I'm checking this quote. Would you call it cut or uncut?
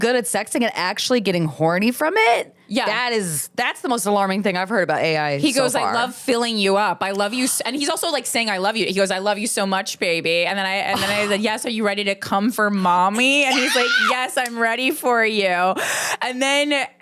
uncut